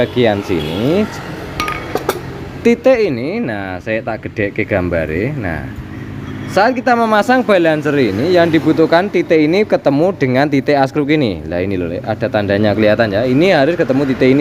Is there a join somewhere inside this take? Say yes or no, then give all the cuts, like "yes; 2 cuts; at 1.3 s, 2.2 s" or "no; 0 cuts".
no; 0 cuts